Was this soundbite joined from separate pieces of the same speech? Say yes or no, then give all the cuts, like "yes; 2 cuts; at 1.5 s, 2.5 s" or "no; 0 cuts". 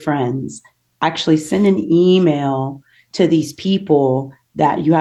no; 0 cuts